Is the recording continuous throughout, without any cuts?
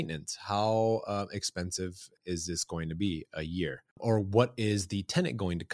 no; 2 cuts; at 2.1 s, 3.9 s

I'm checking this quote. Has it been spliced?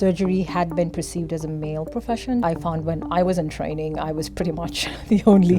yes; 1 cut; at 2.4 s

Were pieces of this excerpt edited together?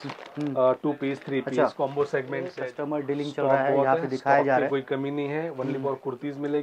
yes; 1 cut; at 2.6 s

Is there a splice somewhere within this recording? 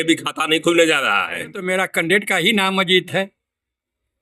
yes; 1 cut; at 1.6 s

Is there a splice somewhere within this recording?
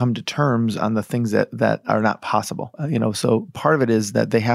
yes; 1 cut; at 2.8 s

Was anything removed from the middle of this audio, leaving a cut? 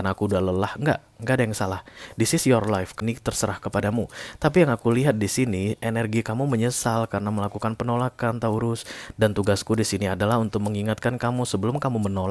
yes; 1 cut; at 3.0 s

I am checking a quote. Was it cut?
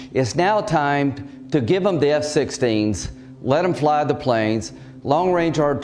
no; 0 cuts

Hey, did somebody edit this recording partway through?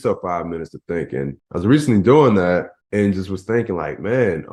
yes; 2 cuts; at 1.4 s, 2.8 s

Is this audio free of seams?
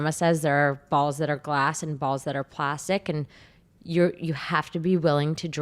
yes; 0 cuts

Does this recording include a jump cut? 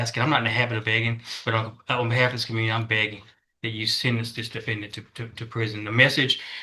no; 0 cuts

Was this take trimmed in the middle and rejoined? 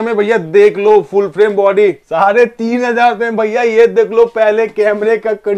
yes; 1 cut; at 2.0 s

